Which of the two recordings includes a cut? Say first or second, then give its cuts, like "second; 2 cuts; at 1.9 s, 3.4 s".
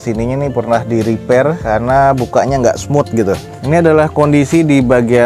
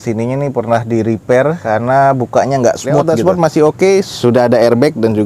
second; 1 cut; at 3.1 s